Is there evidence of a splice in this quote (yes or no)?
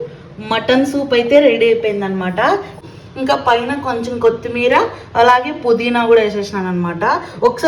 yes